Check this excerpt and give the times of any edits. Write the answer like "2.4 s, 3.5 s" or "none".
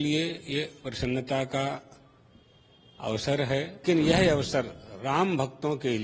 3.8 s